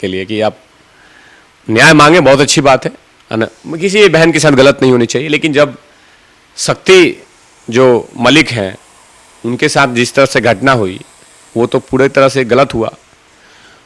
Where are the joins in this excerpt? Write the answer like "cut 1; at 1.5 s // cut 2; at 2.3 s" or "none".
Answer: none